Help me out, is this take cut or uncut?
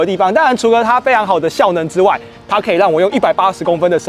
cut